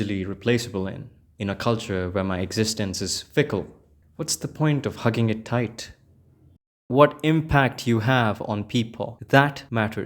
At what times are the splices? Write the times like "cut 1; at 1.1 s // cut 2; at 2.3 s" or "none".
cut 1; at 6.6 s